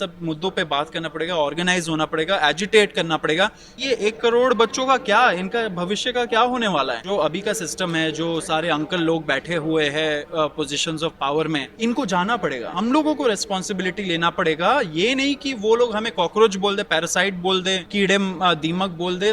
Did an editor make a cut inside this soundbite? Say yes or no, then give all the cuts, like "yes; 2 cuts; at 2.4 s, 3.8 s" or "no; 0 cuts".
yes; 5 cuts; at 3.7 s, 7.0 s, 11.7 s, 12.7 s, 17.8 s